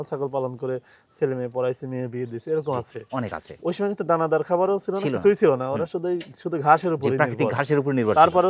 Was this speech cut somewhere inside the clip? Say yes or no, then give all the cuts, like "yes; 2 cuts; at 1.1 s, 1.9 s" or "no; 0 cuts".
no; 0 cuts